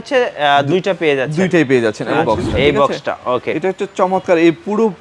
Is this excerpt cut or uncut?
cut